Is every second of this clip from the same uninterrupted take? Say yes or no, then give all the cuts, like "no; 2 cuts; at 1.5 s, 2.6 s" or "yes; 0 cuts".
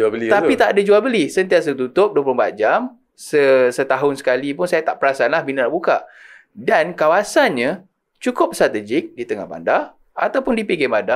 yes; 0 cuts